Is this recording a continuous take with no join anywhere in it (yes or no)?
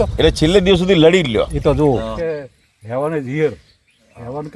no